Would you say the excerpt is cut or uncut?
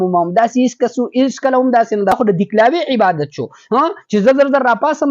cut